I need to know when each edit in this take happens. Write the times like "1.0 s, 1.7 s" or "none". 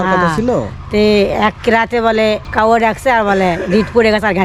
2.5 s

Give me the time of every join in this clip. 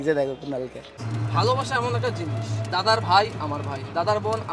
1.1 s

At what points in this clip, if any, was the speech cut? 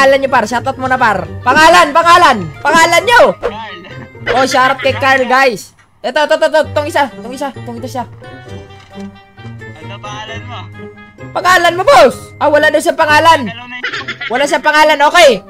1.3 s, 2.5 s, 12.3 s

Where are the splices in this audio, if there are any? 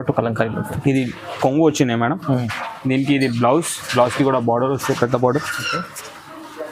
none

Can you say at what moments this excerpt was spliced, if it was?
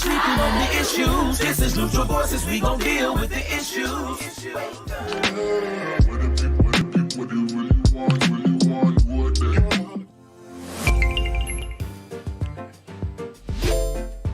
11.7 s

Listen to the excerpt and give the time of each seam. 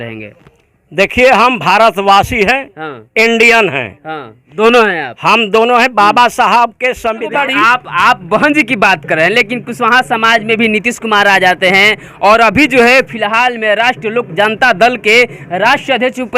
7.4 s

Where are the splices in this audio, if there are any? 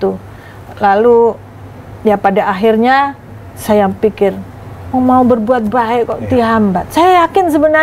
none

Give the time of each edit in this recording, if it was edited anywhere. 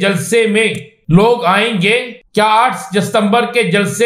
0.9 s, 2.2 s

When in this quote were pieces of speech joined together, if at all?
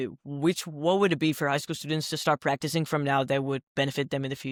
none

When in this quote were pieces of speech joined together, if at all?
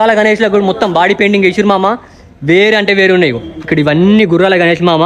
none

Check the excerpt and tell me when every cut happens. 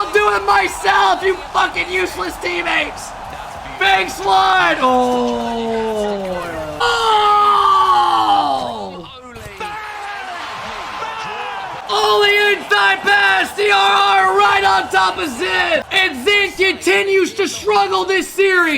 6.8 s, 11.8 s, 15.9 s

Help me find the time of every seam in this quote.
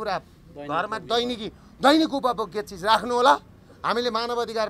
none

